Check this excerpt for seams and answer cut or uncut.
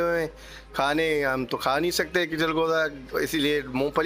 uncut